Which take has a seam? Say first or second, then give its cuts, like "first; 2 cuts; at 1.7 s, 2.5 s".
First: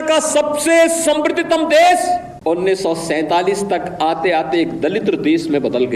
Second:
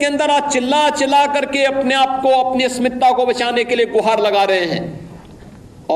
first; 1 cut; at 2.3 s